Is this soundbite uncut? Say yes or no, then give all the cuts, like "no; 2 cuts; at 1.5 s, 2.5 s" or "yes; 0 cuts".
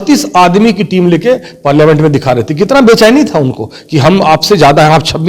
yes; 0 cuts